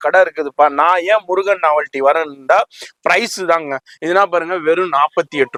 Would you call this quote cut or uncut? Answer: uncut